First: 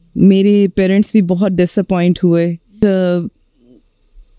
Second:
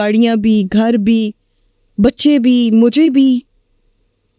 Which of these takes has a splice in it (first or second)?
first